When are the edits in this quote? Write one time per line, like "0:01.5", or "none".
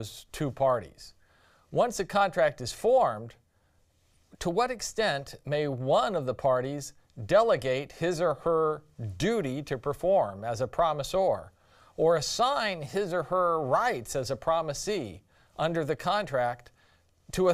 0:11.3